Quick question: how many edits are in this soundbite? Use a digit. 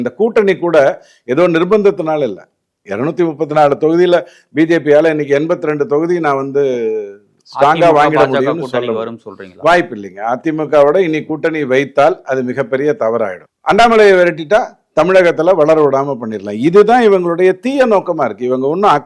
1